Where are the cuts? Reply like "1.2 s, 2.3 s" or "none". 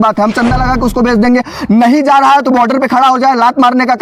none